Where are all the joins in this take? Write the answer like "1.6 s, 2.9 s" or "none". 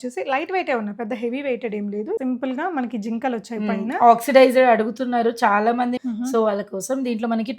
2.2 s, 6.0 s